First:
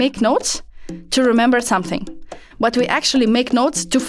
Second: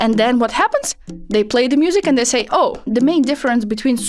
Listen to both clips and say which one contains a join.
second; 1 cut; at 2.9 s

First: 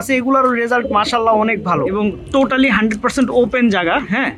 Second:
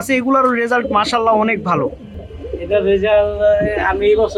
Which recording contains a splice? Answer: first; 1 cut; at 1.9 s

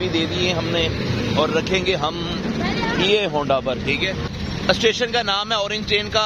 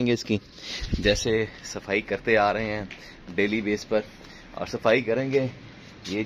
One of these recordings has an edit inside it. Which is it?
first; 1 cut; at 4.3 s

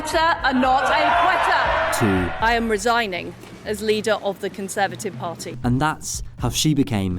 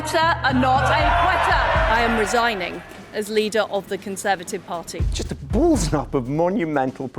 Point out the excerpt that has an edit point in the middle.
second; 2 cuts; at 1.9 s, 5.0 s

